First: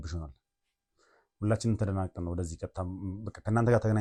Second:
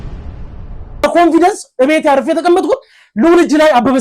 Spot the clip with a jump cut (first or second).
second